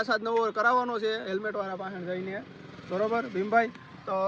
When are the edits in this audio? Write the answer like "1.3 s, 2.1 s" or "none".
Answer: none